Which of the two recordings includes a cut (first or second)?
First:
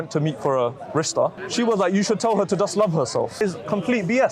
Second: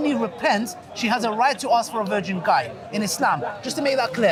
first